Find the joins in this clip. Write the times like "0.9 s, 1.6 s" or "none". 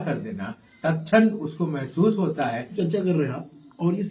2.7 s